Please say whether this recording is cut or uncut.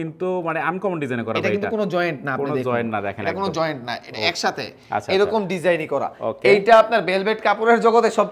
uncut